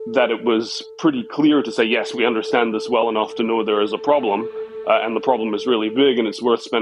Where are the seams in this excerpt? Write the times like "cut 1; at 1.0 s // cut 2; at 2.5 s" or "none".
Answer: none